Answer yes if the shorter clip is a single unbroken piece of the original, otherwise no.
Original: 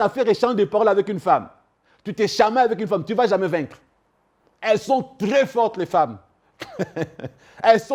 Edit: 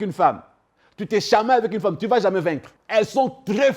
no